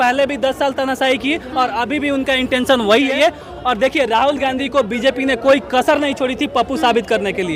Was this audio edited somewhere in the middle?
yes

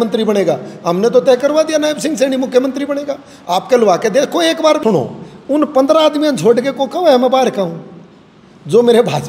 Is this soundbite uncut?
no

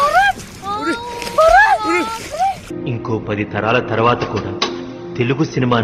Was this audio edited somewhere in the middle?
no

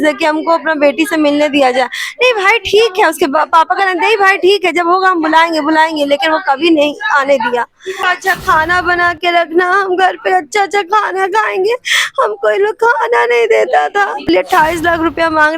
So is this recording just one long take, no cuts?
no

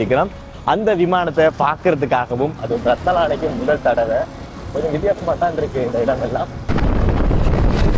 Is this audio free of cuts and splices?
no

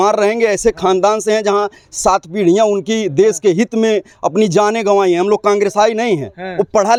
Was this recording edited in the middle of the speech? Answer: no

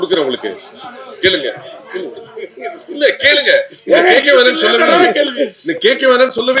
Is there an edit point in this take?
no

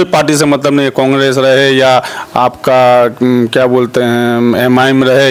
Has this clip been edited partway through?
no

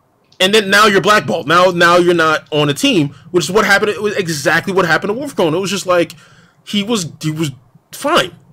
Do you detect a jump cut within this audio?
no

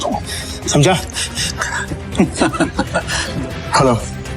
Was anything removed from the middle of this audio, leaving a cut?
yes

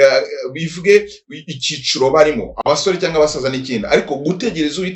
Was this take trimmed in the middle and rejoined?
no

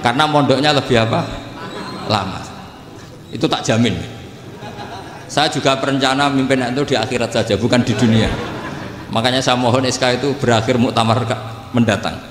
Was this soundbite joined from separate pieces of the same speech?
no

